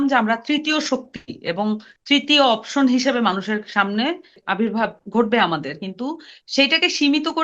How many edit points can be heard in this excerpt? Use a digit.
1